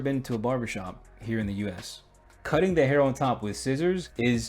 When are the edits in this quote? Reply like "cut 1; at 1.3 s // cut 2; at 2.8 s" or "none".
cut 1; at 2.4 s